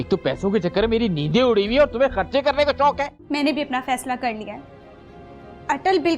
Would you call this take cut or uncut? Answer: cut